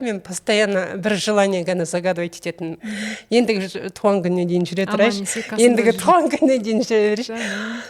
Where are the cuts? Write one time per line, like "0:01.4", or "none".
none